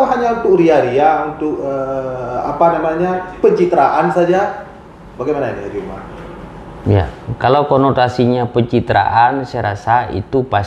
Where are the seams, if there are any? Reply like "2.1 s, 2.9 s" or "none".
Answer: none